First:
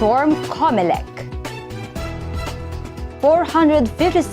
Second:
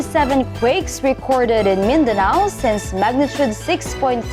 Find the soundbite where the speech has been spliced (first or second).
first